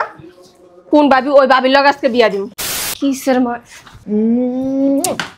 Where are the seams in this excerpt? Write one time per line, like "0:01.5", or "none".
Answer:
0:02.9